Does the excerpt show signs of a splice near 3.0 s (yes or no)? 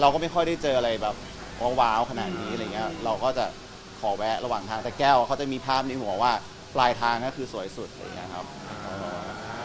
no